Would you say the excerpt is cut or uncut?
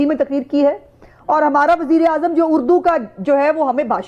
uncut